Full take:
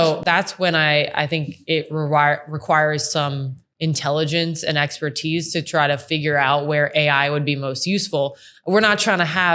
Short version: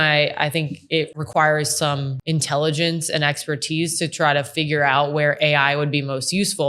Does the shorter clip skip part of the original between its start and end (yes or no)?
yes